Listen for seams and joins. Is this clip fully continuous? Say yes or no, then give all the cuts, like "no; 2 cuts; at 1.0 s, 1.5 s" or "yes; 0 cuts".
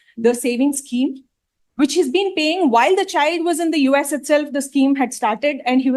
yes; 0 cuts